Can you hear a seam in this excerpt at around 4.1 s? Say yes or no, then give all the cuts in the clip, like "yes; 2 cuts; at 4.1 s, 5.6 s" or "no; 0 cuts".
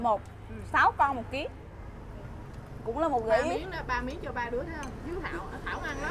no; 1 cut; at 1.7 s